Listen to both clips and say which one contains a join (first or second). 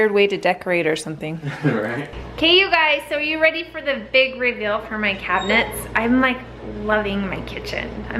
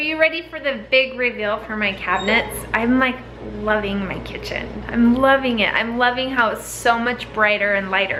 first